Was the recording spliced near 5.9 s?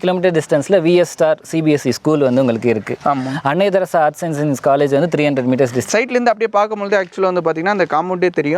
yes; 1 cut; at 5.9 s

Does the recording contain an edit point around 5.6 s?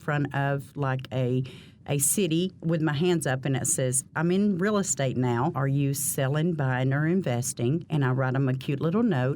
yes; 3 cuts; at 4.0 s, 5.6 s, 7.9 s

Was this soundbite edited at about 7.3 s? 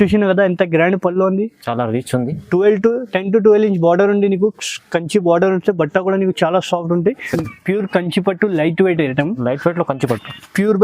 yes; 1 cut; at 7.3 s

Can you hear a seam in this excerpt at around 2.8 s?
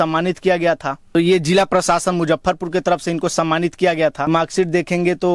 no; 2 cuts; at 1.0 s, 4.3 s

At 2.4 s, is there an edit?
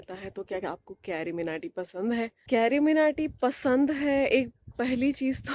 yes; 1 cut; at 2.4 s

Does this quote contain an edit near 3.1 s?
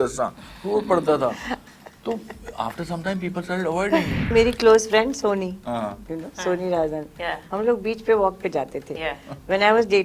no; 1 cut; at 4.3 s

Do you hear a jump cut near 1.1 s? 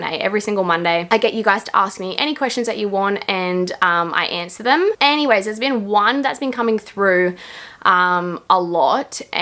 no; 0 cuts

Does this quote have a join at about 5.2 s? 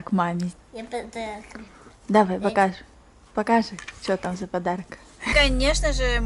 yes; 1 cut; at 5.2 s

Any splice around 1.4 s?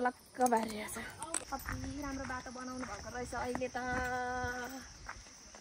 yes; 1 cut; at 1.4 s

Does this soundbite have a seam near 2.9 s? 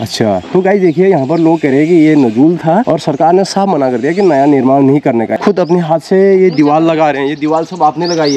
yes; 2 cuts; at 2.9 s, 5.4 s

